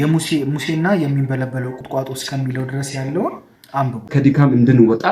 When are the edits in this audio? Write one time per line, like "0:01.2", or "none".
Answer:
0:04.1

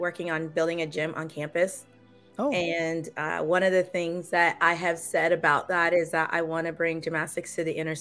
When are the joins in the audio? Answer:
none

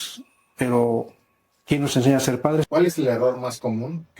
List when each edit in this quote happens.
0:02.7

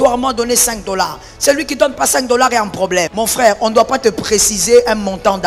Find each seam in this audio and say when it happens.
0:03.1

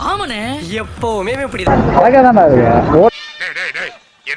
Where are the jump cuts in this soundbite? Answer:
0:01.7

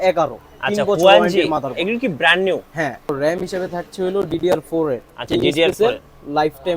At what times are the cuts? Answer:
0:03.1

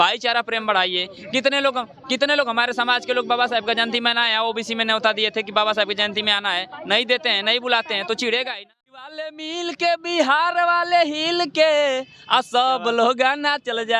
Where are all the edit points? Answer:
0:09.3

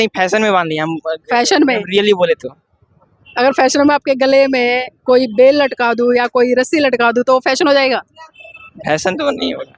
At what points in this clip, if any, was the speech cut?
none

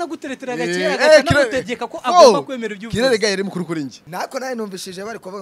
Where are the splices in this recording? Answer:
0:04.0

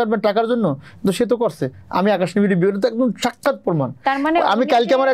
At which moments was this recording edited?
none

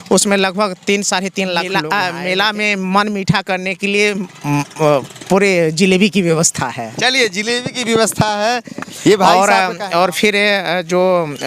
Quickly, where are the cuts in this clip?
0:01.8
0:09.3

